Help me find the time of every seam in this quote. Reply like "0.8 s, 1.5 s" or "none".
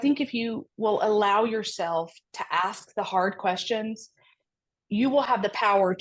none